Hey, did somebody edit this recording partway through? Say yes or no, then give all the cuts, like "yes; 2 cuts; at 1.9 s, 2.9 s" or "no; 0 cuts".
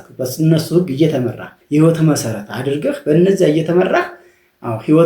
yes; 1 cut; at 1.6 s